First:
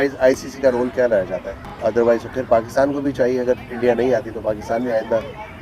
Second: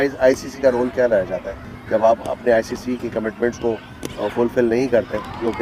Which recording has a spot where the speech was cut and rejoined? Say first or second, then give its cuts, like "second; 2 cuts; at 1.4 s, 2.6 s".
first; 1 cut; at 1.7 s